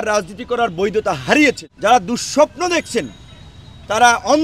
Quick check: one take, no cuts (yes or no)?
no